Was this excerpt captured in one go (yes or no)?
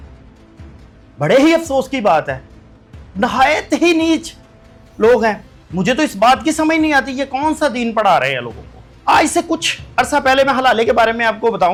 yes